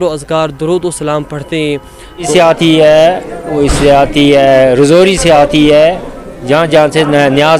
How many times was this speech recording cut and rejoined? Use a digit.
1